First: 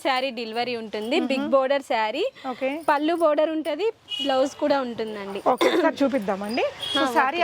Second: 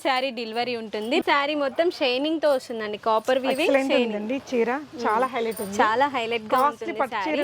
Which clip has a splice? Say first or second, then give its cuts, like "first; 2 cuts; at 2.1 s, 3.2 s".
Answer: second; 1 cut; at 1.2 s